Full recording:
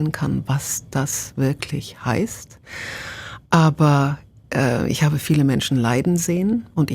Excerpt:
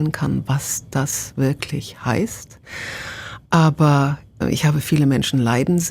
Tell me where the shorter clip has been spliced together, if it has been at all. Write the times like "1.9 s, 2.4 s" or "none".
4.4 s

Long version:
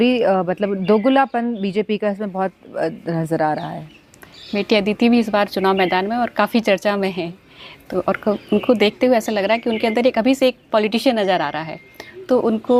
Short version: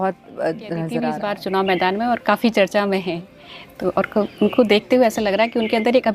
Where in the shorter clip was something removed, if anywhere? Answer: 1.2 s

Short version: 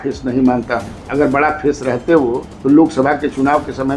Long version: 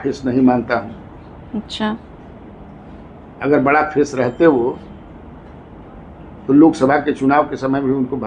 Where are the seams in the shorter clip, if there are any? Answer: 1.0 s, 2.5 s

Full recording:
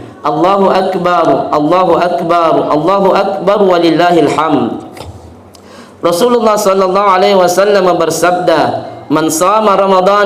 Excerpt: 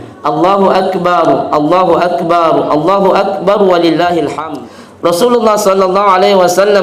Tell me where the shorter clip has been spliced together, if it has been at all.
4.4 s

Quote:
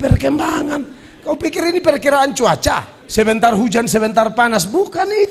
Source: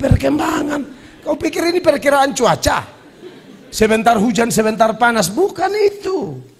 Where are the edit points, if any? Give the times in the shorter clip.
2.9 s

